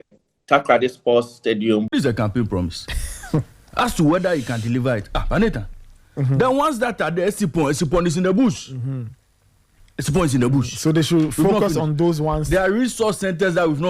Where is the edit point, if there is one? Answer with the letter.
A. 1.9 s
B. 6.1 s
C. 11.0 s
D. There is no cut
A